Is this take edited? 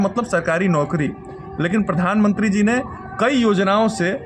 no; 0 cuts

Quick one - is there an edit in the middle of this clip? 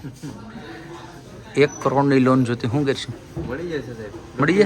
no; 0 cuts

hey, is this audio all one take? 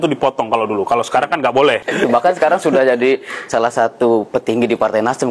no; 1 cut; at 1.9 s

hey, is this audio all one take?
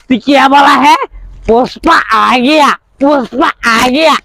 yes; 0 cuts

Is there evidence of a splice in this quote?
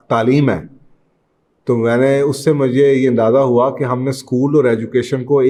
no; 0 cuts

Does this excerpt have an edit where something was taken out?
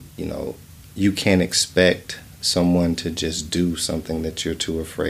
no; 0 cuts

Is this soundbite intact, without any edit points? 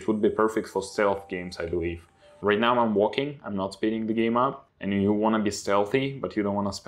no; 2 cuts; at 2.3 s, 4.7 s

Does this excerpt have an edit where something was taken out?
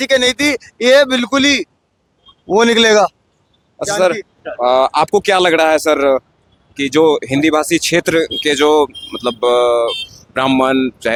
no; 0 cuts

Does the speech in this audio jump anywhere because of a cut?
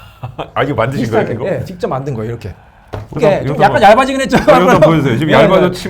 yes; 1 cut; at 3.2 s

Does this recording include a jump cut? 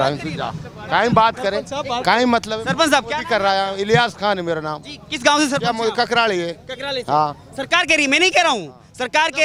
no; 0 cuts

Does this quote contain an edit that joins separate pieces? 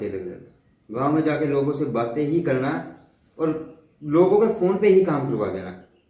no; 0 cuts

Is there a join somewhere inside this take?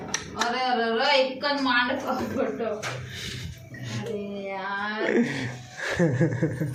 no; 0 cuts

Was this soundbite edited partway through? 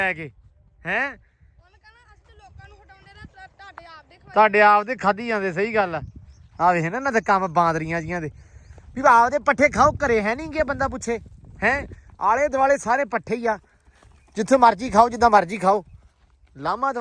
no; 0 cuts

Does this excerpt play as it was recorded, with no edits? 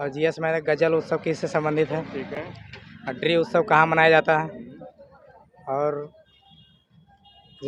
yes; 0 cuts

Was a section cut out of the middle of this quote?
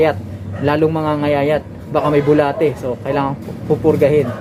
no; 0 cuts

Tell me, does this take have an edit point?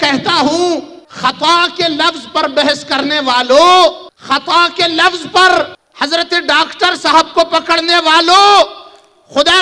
yes; 3 cuts; at 1.0 s, 4.1 s, 5.8 s

